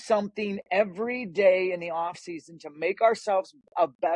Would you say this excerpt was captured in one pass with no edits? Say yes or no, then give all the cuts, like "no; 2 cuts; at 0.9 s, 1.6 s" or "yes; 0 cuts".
yes; 0 cuts